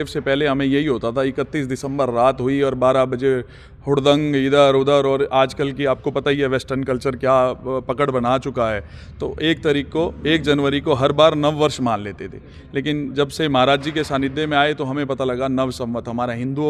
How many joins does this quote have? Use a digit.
0